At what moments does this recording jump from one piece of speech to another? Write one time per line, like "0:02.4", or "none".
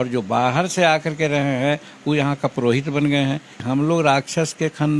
0:03.6